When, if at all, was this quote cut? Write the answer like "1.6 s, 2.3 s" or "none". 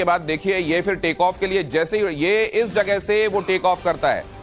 2.7 s